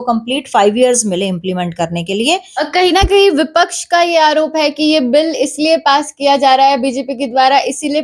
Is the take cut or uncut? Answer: cut